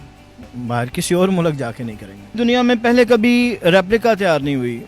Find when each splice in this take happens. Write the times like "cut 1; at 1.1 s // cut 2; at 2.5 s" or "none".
cut 1; at 2.3 s